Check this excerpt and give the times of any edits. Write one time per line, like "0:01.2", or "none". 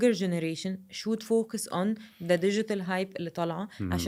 none

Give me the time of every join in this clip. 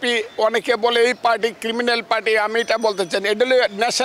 none

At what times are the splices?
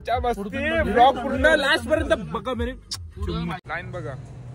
0:03.6

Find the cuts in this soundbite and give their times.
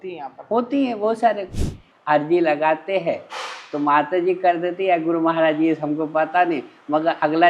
0:01.9

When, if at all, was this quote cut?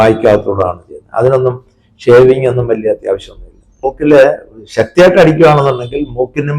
0:03.8

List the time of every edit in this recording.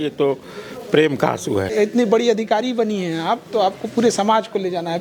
0:01.7

